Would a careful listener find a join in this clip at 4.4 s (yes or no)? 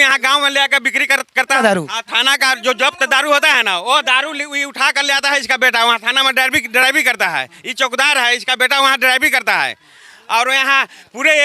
no